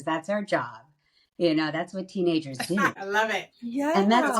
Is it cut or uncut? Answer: uncut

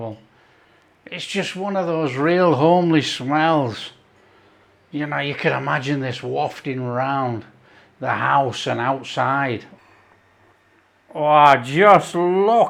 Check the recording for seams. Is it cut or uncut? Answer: uncut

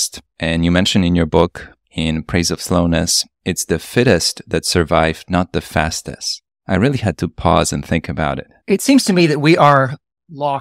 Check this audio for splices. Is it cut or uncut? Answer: cut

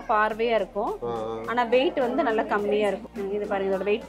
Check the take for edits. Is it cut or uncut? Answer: cut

